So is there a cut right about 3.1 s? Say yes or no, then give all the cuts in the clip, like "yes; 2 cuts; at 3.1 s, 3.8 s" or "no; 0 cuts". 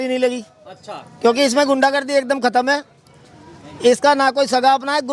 no; 0 cuts